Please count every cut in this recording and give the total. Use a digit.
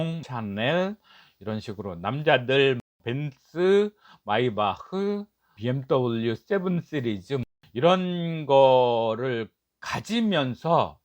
1